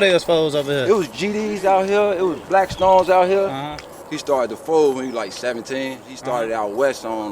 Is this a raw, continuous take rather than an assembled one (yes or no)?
no